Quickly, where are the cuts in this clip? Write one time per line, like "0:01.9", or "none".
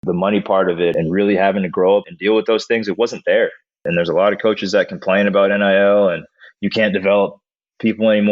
0:00.9
0:02.1
0:03.8